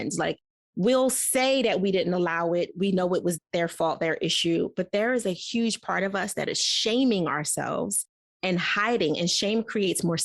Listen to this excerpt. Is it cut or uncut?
cut